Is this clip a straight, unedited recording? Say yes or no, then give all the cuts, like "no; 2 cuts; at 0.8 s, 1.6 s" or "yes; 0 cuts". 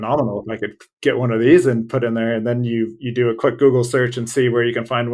yes; 0 cuts